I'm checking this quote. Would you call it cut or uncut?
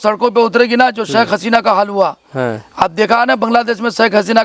uncut